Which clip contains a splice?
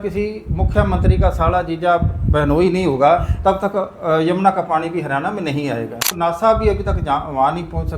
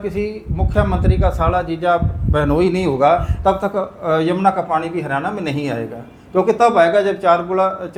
first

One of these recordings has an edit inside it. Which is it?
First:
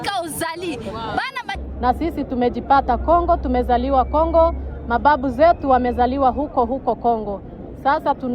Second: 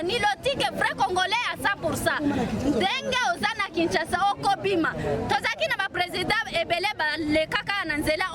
first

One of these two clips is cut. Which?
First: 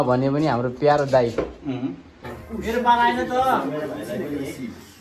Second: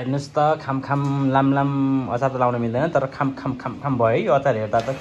first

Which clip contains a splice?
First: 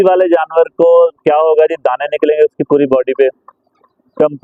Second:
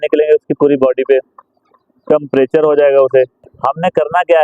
second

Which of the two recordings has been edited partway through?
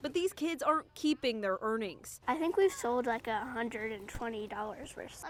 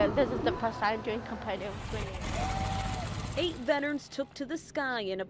second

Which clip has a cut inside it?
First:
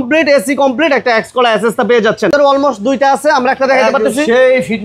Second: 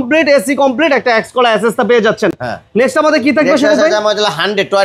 first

